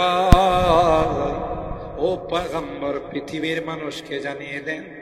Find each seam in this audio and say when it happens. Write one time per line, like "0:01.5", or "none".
none